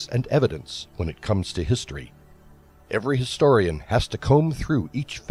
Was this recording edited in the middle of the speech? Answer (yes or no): no